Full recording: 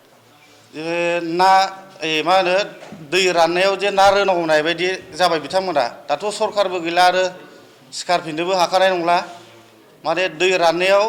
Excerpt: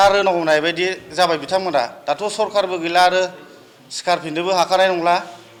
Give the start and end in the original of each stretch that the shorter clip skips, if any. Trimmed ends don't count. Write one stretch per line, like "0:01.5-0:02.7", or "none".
none